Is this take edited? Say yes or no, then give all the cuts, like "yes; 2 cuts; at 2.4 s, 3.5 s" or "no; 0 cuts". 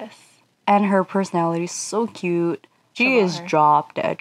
yes; 1 cut; at 2.9 s